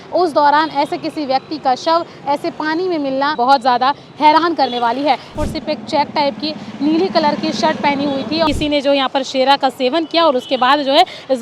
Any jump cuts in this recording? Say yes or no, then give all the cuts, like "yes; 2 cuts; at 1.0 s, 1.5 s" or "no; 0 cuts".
yes; 3 cuts; at 3.4 s, 5.3 s, 8.5 s